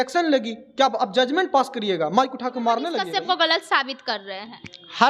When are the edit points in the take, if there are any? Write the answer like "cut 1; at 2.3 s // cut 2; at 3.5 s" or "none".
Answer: cut 1; at 3.0 s